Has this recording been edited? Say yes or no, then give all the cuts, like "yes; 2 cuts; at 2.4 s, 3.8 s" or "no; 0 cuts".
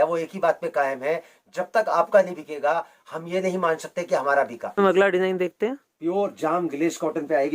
yes; 1 cut; at 4.8 s